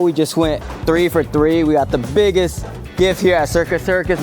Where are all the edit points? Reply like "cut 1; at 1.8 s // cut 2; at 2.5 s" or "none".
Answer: none